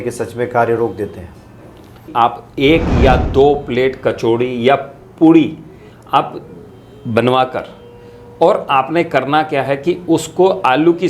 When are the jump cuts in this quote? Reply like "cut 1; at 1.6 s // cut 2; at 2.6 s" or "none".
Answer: cut 1; at 2.1 s